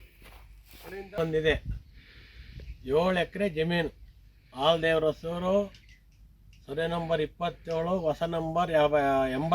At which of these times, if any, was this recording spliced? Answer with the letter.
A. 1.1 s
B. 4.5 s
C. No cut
A